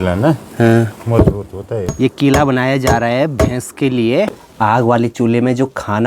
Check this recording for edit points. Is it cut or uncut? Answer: cut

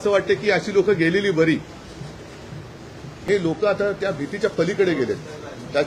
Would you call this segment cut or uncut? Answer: cut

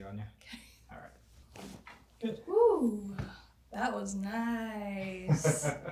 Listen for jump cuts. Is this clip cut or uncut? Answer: cut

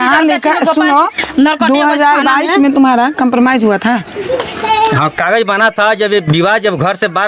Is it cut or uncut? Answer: uncut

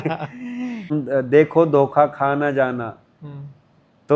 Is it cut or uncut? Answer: cut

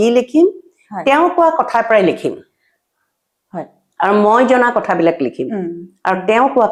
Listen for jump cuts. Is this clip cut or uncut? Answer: uncut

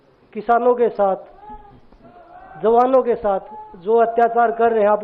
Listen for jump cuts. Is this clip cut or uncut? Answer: uncut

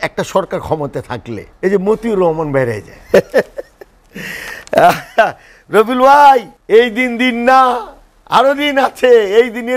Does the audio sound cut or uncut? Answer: cut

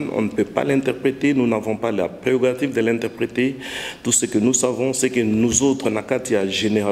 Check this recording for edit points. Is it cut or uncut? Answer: uncut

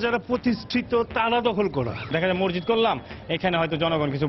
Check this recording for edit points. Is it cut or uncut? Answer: cut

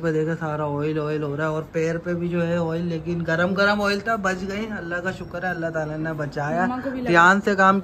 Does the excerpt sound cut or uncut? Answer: uncut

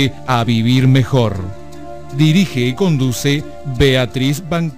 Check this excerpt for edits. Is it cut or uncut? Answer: uncut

